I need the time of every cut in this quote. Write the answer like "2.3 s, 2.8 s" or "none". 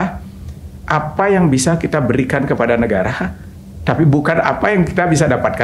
none